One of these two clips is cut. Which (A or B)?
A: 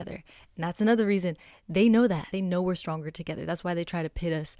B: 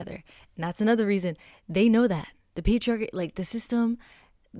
A